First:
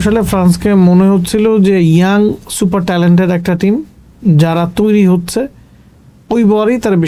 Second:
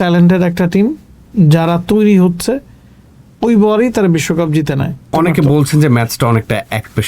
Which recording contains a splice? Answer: second; 1 cut; at 5.1 s

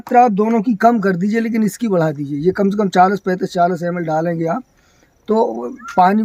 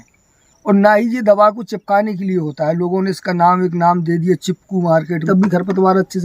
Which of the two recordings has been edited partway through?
second; 1 cut; at 5.3 s

